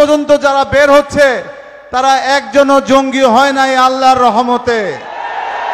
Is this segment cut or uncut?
uncut